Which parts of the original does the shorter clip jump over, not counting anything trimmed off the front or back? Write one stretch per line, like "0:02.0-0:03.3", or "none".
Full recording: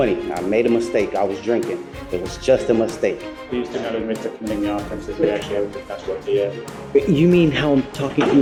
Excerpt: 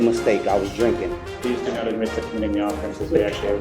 0:01.9-0:03.3